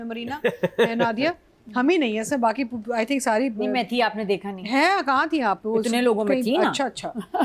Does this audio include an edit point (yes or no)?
no